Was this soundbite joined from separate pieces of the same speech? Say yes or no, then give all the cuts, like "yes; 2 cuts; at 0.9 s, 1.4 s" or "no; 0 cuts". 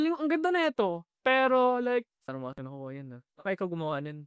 yes; 1 cut; at 2.2 s